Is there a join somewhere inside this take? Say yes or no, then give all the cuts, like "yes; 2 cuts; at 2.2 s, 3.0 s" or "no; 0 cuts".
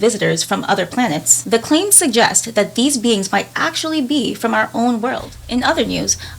yes; 2 cuts; at 1.3 s, 5.3 s